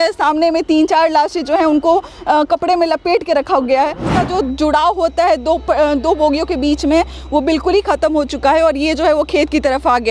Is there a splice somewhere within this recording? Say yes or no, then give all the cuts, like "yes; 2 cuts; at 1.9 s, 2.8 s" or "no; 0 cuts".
yes; 1 cut; at 4.1 s